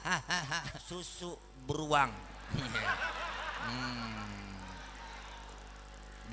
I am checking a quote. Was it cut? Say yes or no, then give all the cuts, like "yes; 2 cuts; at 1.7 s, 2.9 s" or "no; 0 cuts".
yes; 1 cut; at 1.1 s